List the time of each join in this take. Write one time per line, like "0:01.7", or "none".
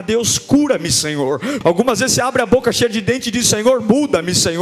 0:01.6